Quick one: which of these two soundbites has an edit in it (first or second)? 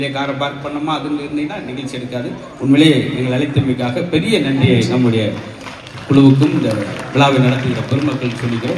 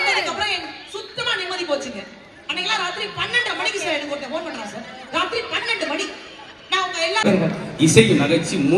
second